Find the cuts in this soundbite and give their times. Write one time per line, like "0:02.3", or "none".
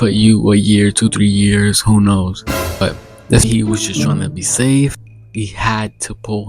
0:03.4